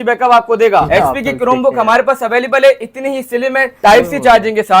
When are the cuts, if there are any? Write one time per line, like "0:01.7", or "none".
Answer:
0:00.9
0:03.7